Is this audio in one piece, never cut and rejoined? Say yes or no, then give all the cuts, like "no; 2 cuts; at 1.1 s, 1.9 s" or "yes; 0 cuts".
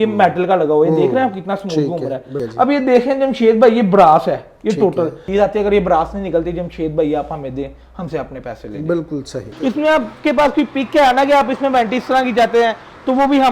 no; 3 cuts; at 2.4 s, 5.2 s, 9.4 s